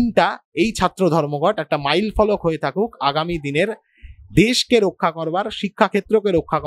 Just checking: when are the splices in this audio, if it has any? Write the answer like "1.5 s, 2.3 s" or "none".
none